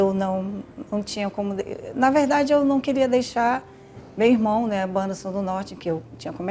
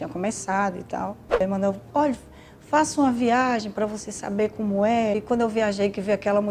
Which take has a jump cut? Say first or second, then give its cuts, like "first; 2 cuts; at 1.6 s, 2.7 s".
second; 2 cuts; at 1.4 s, 5.1 s